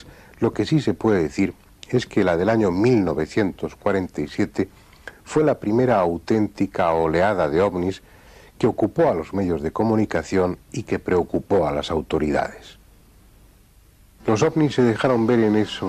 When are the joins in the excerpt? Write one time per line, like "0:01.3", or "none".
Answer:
none